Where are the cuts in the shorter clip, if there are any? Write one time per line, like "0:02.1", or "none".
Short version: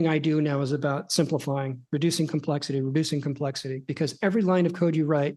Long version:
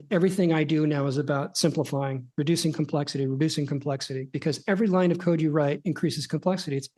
none